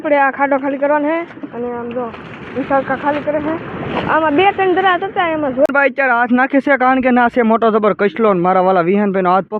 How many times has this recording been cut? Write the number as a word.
one